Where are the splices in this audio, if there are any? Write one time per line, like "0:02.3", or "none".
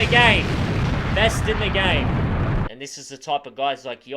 0:02.7